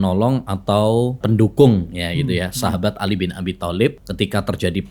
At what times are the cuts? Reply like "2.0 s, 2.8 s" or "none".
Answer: 1.2 s, 4.0 s

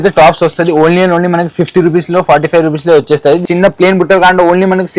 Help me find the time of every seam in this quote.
3.4 s

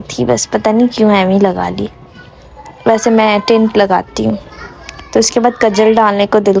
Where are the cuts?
none

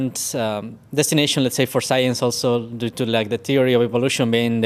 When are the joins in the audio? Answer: none

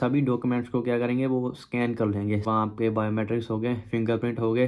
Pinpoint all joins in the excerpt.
2.4 s

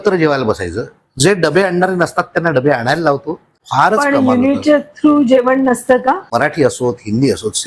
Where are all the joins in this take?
3.6 s, 6.3 s

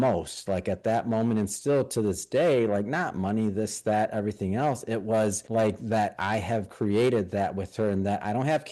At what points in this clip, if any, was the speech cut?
5.4 s

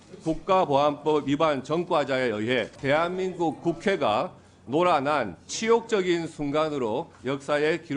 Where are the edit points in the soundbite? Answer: 2.7 s

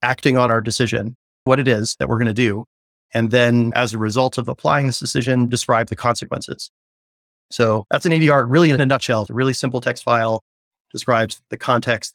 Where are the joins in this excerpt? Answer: 7.0 s, 9.3 s

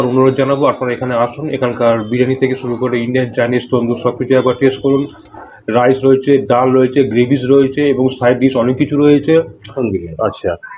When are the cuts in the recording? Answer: 9.8 s

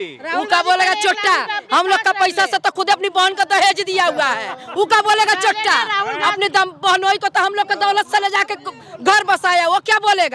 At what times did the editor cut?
none

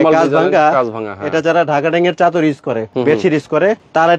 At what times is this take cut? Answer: 2.9 s

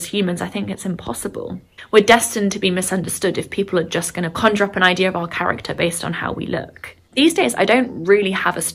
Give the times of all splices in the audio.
none

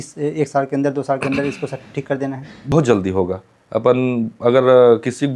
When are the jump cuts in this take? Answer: 2.7 s

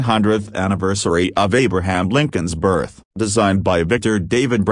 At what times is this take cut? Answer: 3.3 s

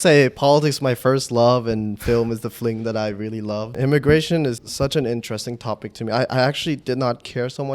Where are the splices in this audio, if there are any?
3.7 s, 4.6 s

